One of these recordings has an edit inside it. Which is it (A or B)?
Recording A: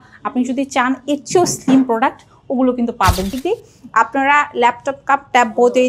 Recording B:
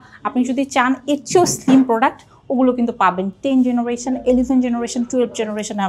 A